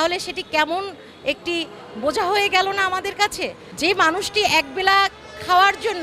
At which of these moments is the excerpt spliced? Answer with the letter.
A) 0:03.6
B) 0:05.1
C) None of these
A